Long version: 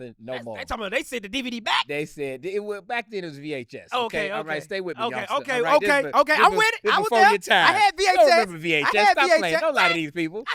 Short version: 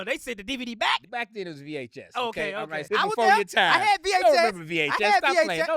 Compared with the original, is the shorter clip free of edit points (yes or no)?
no